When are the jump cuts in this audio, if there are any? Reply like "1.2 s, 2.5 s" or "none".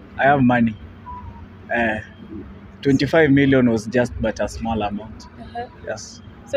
none